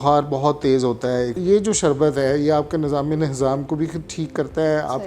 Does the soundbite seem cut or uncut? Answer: cut